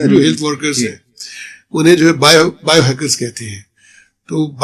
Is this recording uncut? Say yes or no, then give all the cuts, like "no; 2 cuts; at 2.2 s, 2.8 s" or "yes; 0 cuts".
yes; 0 cuts